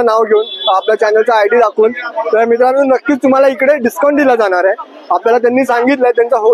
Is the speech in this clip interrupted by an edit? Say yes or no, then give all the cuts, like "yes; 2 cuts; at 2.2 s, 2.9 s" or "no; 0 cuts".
no; 0 cuts